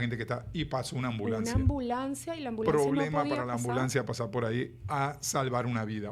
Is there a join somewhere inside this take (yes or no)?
no